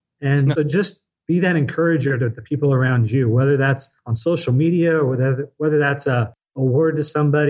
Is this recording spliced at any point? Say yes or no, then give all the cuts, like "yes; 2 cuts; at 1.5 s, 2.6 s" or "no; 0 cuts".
no; 0 cuts